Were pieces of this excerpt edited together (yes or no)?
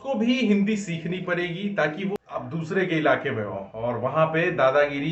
yes